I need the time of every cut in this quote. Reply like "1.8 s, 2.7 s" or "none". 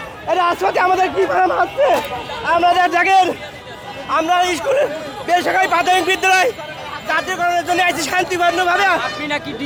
none